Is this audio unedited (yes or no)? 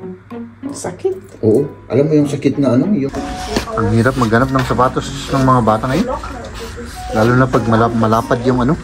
no